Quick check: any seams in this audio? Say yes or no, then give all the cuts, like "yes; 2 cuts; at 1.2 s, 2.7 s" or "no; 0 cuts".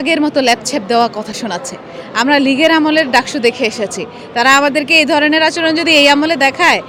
no; 0 cuts